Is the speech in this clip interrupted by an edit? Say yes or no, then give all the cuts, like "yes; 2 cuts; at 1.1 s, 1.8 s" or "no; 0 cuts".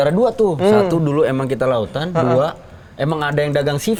no; 0 cuts